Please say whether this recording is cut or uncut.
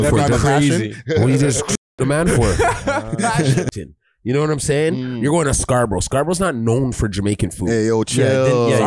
cut